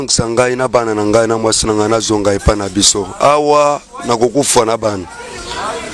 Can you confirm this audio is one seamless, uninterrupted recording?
yes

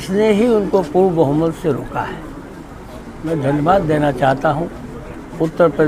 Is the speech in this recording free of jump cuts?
yes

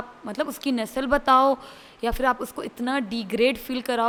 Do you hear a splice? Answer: no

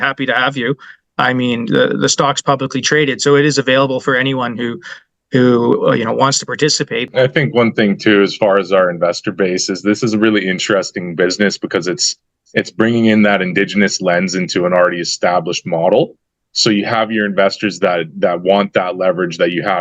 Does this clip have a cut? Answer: yes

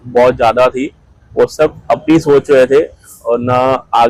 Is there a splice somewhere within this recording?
no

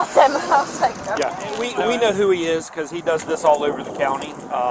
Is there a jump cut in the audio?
yes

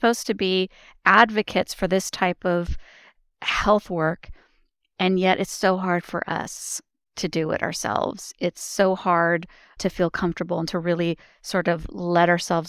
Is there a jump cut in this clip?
yes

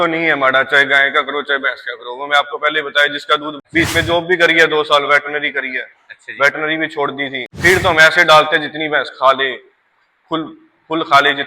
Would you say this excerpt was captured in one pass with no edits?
no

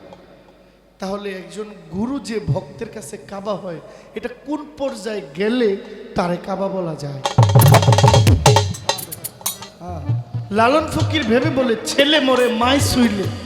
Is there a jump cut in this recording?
yes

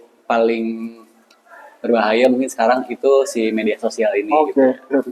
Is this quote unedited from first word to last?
yes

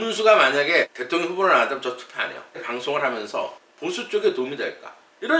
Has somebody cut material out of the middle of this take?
yes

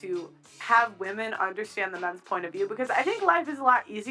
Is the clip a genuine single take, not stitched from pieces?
yes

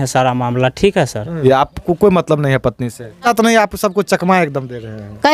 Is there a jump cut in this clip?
yes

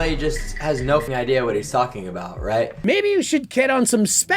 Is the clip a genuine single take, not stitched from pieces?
no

